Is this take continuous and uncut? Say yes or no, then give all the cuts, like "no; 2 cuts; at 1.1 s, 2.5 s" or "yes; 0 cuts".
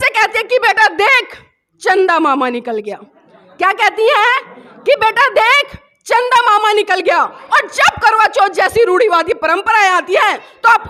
yes; 0 cuts